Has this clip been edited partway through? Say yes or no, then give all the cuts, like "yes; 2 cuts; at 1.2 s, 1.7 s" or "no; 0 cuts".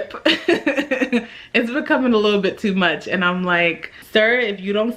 yes; 1 cut; at 3.9 s